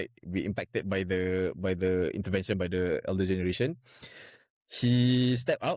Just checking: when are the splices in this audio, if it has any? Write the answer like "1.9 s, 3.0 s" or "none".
none